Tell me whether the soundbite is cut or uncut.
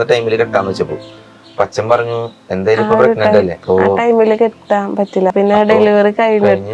cut